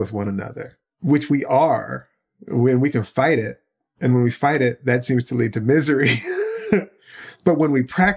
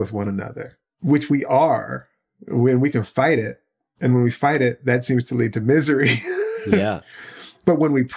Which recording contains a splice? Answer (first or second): first